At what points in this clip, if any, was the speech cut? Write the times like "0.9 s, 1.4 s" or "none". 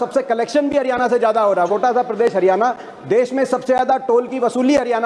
1.7 s